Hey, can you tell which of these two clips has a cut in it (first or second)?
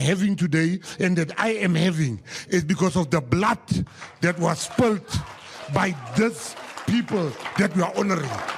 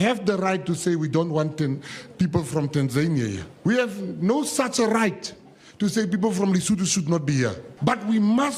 second